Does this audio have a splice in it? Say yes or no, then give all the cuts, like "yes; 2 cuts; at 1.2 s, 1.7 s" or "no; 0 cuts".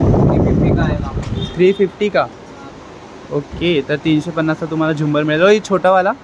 no; 0 cuts